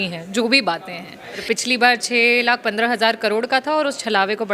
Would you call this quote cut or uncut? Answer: cut